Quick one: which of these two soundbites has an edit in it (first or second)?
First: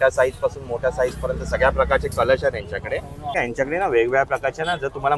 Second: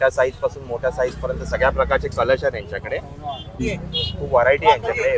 first